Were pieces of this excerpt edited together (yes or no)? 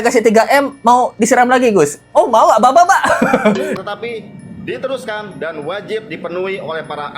yes